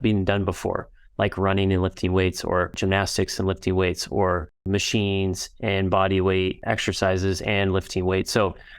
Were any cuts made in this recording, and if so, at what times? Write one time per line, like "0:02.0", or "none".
0:02.8
0:04.6
0:06.6